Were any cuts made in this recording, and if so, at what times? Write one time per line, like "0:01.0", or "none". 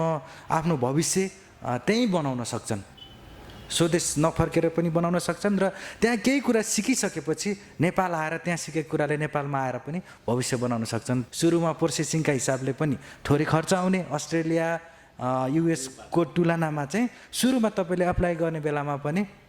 0:11.2